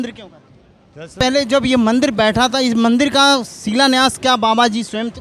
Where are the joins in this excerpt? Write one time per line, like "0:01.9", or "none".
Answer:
0:01.2